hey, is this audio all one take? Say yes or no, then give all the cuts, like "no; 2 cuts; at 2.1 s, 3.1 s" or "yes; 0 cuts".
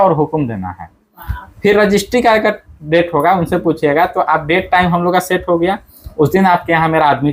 yes; 0 cuts